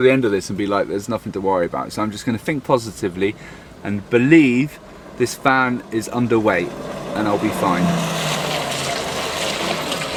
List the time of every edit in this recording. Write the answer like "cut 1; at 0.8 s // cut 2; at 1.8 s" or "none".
none